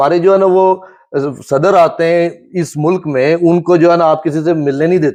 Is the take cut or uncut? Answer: uncut